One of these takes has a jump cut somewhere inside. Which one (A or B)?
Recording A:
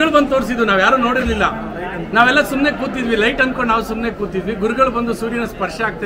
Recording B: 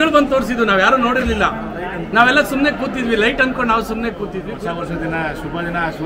B